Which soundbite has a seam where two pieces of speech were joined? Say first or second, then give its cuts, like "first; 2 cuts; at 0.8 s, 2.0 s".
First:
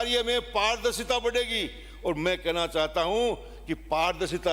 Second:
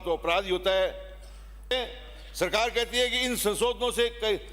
second; 1 cut; at 1.7 s